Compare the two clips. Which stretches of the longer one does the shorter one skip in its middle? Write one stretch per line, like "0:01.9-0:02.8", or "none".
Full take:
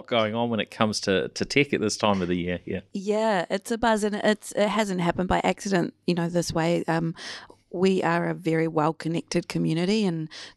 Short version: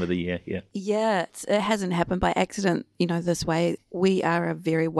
0:03.5-0:04.4
0:06.8-0:07.6